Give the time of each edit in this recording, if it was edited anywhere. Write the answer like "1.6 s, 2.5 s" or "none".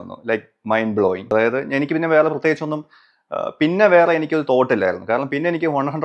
1.3 s